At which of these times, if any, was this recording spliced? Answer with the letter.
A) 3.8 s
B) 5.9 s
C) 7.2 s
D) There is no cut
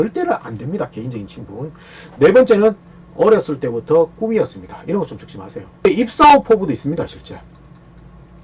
B